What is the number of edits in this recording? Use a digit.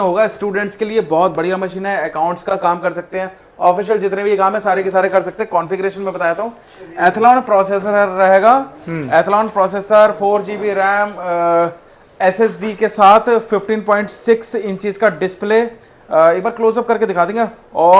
0